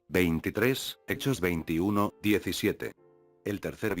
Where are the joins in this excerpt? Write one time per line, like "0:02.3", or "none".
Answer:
0:00.9